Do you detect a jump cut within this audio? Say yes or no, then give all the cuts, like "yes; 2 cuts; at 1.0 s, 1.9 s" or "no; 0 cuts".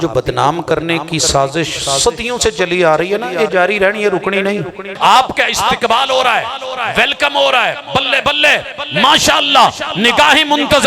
yes; 1 cut; at 4.9 s